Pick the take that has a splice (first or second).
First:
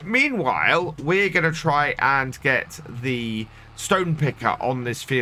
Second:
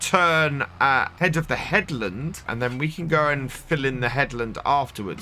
second